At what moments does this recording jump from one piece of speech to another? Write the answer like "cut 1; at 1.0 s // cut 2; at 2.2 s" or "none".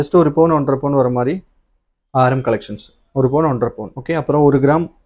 cut 1; at 3.9 s